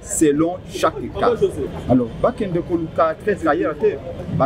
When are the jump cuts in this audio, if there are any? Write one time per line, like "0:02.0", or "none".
none